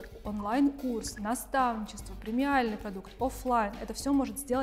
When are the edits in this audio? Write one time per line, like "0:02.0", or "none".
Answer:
none